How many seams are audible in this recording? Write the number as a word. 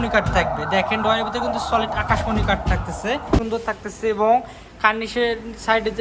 one